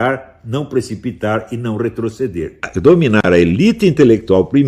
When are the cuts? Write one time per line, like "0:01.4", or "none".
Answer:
0:02.6

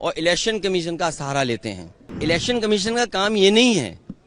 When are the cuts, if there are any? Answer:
0:02.2

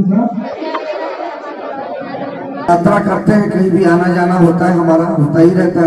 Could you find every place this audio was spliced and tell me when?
0:02.7

